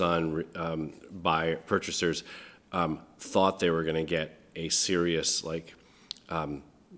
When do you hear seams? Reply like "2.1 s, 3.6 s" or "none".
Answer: none